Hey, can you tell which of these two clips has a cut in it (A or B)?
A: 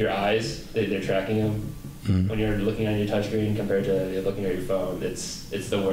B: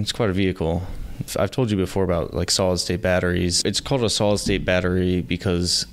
B